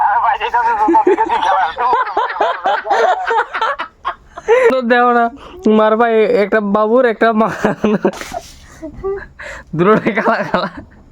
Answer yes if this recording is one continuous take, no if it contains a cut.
no